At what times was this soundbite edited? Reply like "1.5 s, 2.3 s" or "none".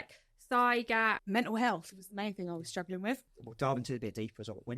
1.2 s, 3.4 s